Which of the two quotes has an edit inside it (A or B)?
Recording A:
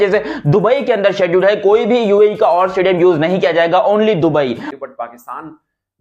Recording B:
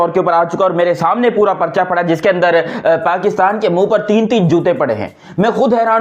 A